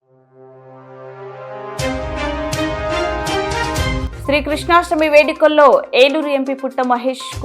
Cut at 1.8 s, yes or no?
no